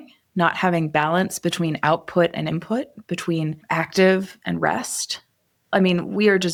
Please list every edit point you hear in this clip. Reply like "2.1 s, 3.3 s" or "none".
none